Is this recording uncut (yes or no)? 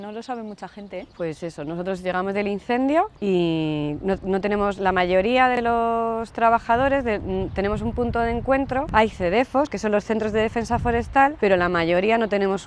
no